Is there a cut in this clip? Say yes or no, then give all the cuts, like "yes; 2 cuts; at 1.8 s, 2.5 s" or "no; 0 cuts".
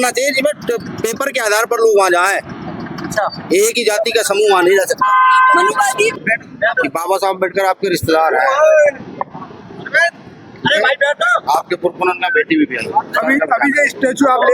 yes; 1 cut; at 6.2 s